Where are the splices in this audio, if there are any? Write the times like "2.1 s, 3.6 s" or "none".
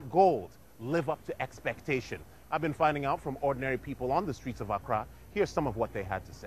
1.8 s